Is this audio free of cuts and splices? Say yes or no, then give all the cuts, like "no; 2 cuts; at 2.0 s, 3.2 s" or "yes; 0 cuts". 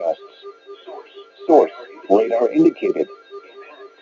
yes; 0 cuts